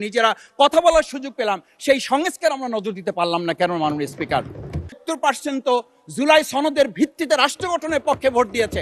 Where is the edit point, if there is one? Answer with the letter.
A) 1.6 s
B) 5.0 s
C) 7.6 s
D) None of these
B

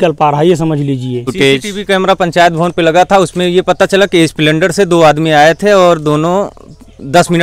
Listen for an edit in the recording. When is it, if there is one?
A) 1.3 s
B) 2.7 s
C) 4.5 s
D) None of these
A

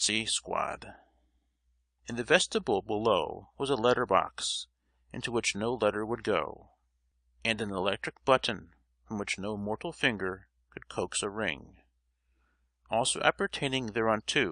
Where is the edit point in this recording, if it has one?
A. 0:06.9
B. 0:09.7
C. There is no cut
B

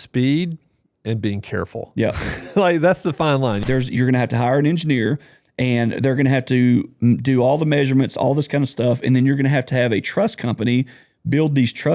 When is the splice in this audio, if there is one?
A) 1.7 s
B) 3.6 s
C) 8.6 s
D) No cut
B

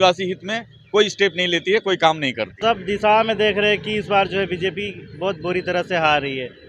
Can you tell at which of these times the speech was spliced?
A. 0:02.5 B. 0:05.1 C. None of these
A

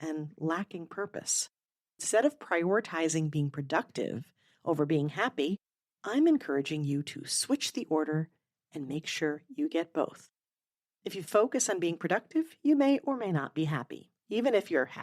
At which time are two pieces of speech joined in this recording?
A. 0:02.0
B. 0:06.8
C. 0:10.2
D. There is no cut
A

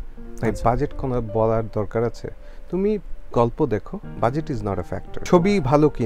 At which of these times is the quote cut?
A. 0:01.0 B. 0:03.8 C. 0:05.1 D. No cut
C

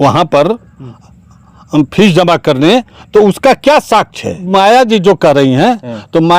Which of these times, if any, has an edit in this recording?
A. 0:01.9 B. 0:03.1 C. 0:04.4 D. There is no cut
C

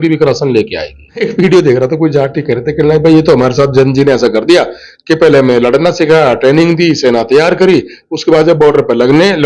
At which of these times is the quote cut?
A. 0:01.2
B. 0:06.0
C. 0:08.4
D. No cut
A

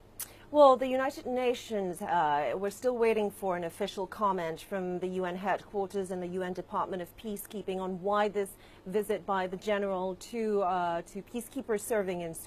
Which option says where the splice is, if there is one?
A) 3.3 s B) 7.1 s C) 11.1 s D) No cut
A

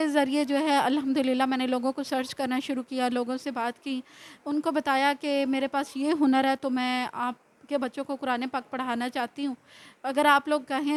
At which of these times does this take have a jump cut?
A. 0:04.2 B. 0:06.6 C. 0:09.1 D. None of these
D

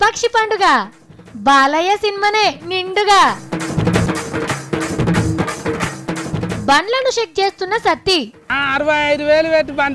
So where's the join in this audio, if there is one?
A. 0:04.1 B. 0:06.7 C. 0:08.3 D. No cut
A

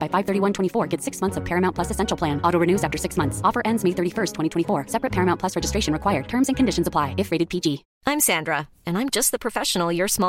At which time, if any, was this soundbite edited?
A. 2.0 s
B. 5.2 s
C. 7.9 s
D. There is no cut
C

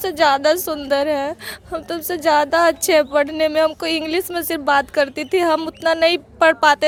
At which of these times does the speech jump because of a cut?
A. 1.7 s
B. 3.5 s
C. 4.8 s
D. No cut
D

